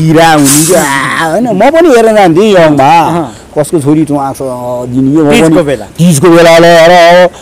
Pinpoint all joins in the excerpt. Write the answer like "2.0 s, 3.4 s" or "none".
none